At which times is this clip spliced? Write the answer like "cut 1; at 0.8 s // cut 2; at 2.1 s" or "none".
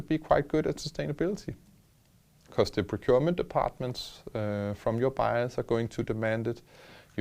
none